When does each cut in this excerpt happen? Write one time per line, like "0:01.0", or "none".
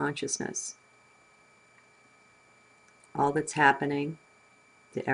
0:00.9